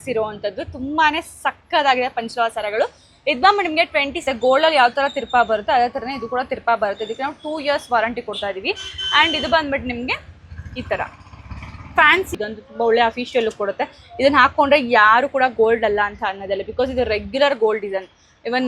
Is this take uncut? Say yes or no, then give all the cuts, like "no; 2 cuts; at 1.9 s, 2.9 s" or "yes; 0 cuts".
no; 2 cuts; at 4.2 s, 12.3 s